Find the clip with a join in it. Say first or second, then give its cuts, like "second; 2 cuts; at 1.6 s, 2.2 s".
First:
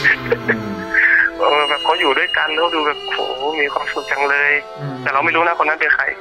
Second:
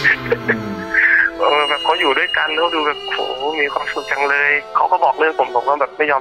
second; 1 cut; at 4.6 s